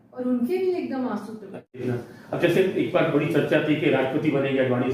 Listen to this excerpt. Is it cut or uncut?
cut